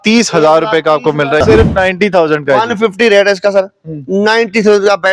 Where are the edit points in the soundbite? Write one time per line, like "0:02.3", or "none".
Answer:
0:01.4

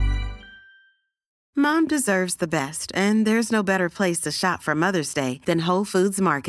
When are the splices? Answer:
0:01.4

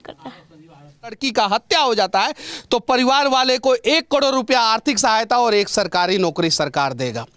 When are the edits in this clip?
0:01.2

